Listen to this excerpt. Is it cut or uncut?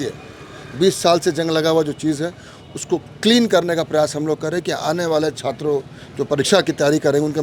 uncut